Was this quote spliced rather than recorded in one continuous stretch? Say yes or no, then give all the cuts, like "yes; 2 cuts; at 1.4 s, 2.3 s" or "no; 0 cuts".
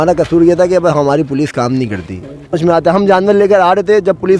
yes; 1 cut; at 2.5 s